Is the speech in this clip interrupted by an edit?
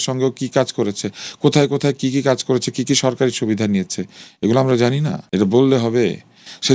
no; 0 cuts

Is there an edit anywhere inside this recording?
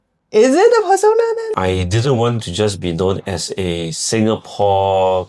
yes; 1 cut; at 1.5 s

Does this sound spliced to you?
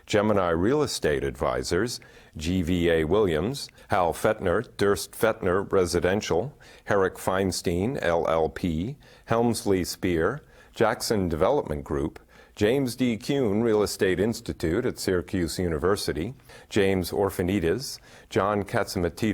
no; 0 cuts

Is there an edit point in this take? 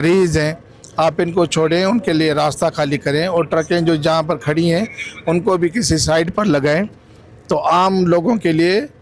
no; 0 cuts

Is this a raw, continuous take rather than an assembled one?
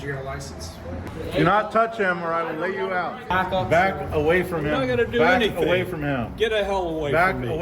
no; 2 cuts; at 1.1 s, 3.3 s

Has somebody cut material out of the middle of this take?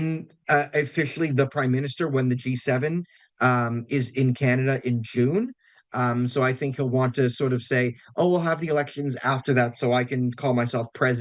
no; 0 cuts

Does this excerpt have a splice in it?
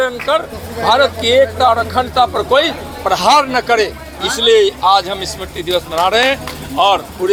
no; 0 cuts

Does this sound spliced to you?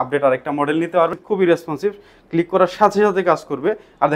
yes; 1 cut; at 1.2 s

